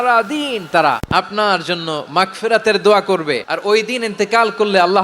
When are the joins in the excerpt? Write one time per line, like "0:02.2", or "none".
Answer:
0:01.0
0:03.5